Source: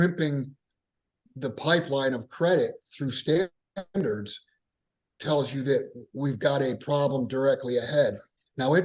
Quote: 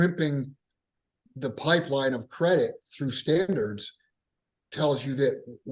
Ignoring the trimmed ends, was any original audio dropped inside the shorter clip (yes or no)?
yes